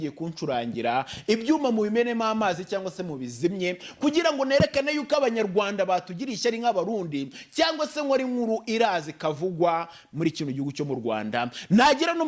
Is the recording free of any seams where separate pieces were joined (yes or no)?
yes